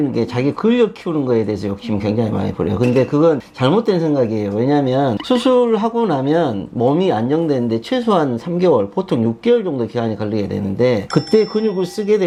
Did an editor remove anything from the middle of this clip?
no; 0 cuts

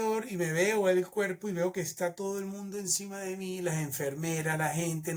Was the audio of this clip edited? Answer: no; 0 cuts

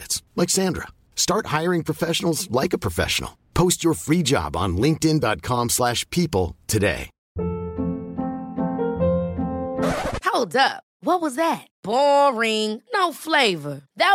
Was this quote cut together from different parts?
yes; 1 cut; at 7.2 s

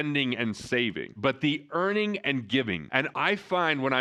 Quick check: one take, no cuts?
yes; 0 cuts

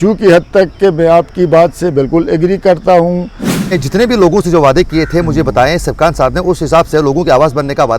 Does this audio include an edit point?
yes; 1 cut; at 3.8 s

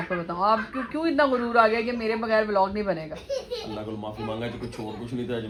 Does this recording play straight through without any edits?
yes; 0 cuts

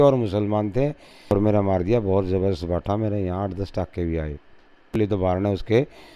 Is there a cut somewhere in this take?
yes; 2 cuts; at 1.3 s, 4.9 s

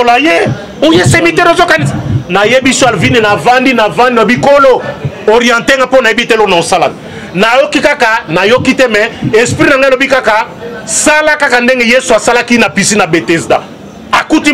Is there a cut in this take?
no; 0 cuts

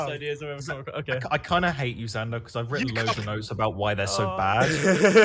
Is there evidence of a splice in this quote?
no; 0 cuts

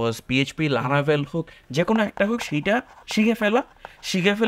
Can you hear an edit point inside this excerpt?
yes; 1 cut; at 1.6 s

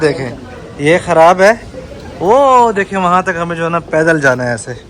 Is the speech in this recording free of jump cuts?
yes; 0 cuts

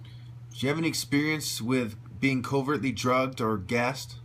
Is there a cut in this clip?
yes; 1 cut; at 1.8 s

